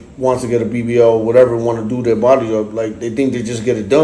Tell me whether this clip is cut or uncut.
uncut